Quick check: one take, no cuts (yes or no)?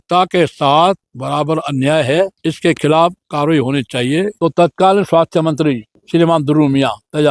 no